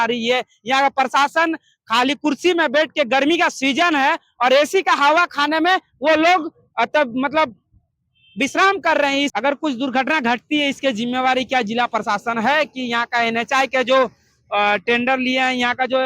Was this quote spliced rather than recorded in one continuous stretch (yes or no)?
yes